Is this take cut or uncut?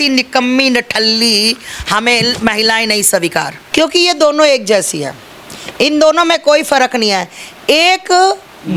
cut